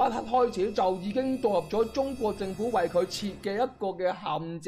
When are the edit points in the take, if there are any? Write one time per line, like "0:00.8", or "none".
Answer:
none